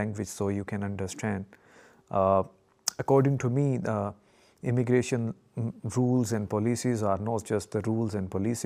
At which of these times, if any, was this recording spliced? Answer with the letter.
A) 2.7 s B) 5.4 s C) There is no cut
C